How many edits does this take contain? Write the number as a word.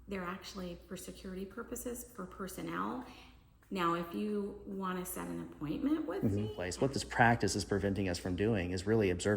one